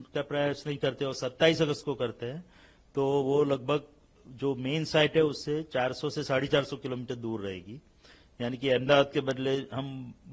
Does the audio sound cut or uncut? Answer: uncut